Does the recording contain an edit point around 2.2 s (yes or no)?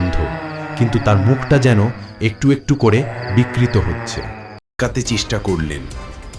no